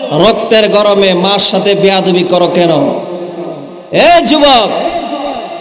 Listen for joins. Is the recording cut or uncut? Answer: uncut